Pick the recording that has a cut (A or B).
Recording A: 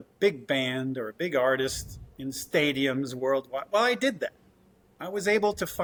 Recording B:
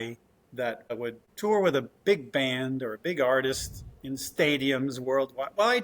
B